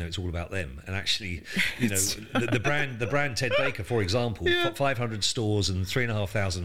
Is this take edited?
no; 0 cuts

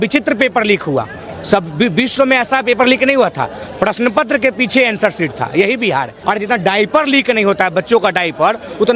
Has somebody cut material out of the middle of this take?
yes; 1 cut; at 6.1 s

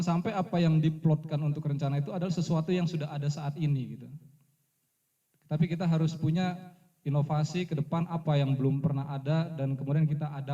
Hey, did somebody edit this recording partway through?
no; 0 cuts

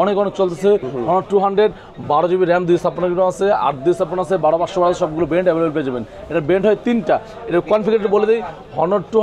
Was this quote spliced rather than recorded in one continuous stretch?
no; 0 cuts

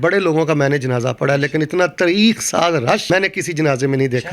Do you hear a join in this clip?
yes; 1 cut; at 3.0 s

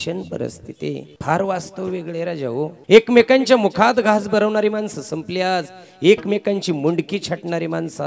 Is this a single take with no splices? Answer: no; 2 cuts; at 1.1 s, 2.8 s

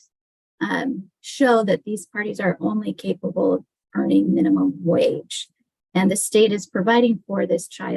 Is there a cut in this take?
no; 0 cuts

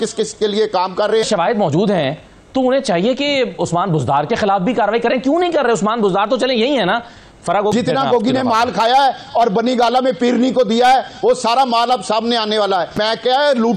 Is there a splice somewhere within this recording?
yes; 3 cuts; at 1.3 s, 7.7 s, 13.0 s

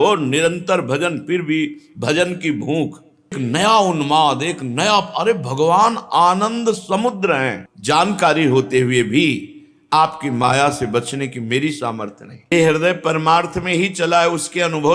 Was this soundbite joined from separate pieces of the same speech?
yes; 3 cuts; at 3.4 s, 7.6 s, 12.5 s

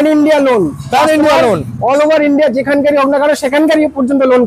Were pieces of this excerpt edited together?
no; 0 cuts

